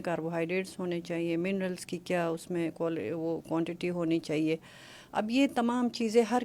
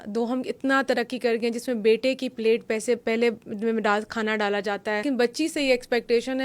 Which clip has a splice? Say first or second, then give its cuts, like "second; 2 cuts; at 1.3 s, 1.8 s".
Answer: second; 1 cut; at 5.0 s